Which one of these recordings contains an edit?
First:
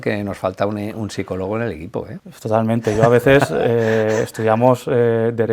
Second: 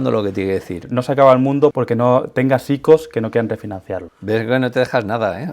second; 2 cuts; at 0.8 s, 1.7 s

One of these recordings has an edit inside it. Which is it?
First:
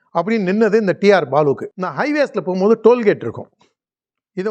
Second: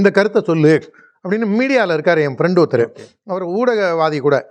first; 1 cut; at 1.8 s

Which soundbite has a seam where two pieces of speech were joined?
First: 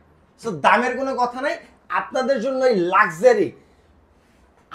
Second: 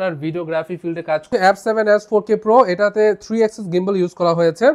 second; 1 cut; at 1.3 s

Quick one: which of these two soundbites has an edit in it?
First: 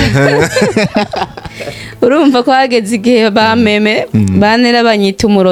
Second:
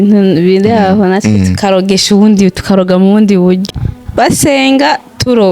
second; 1 cut; at 3.6 s

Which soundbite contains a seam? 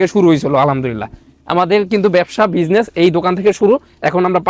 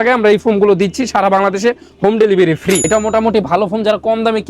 second; 1 cut; at 2.8 s

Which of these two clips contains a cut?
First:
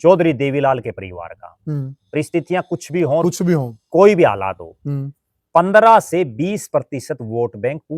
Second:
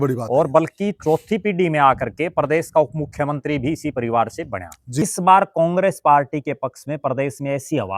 second; 1 cut; at 5.0 s

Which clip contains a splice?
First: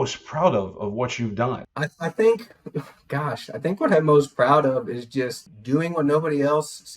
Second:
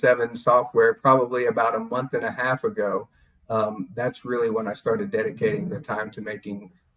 first; 2 cuts; at 1.7 s, 5.4 s

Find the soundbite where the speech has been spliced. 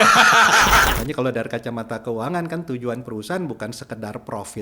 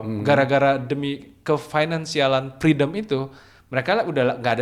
first; 1 cut; at 0.9 s

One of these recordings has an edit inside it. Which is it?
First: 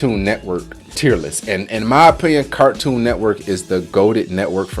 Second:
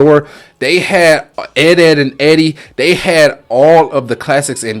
first; 1 cut; at 0.9 s

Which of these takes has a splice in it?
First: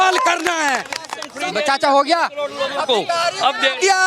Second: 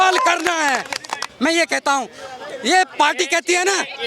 first; 1 cut; at 1.2 s

